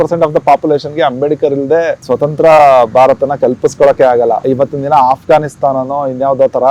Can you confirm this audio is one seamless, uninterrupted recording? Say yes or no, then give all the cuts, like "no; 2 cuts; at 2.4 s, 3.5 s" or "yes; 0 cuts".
no; 2 cuts; at 2.0 s, 4.4 s